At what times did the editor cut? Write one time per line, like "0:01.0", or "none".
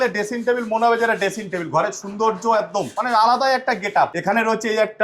0:02.9
0:04.2